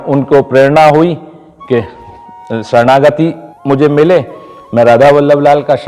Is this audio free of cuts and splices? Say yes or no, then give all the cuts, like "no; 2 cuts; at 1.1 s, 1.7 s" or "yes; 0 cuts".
no; 1 cut; at 3.5 s